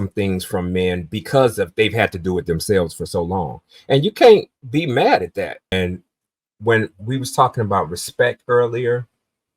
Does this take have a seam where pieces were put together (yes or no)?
yes